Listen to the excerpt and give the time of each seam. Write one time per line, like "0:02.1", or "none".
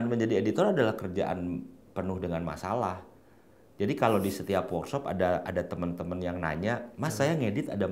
none